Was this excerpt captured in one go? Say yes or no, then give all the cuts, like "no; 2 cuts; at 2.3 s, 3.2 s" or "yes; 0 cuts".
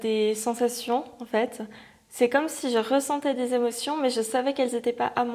yes; 0 cuts